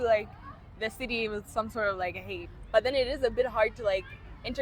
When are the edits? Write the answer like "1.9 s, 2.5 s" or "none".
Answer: 2.5 s